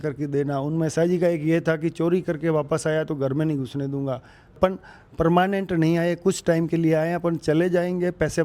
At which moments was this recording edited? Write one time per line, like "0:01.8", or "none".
0:00.9
0:04.6